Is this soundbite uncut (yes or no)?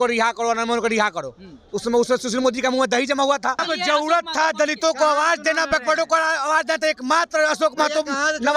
no